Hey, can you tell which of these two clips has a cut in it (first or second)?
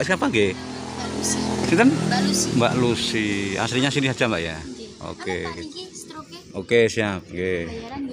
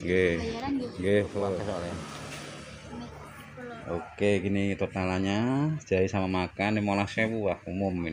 second